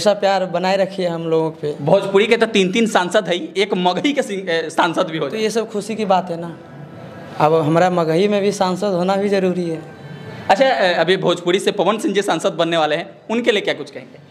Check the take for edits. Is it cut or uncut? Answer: uncut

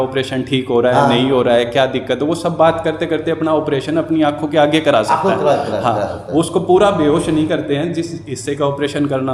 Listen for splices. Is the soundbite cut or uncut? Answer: uncut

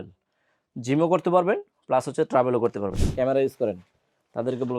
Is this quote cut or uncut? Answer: cut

